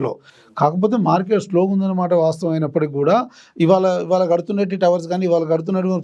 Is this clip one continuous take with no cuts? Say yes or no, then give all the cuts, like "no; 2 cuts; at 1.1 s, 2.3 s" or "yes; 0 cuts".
yes; 0 cuts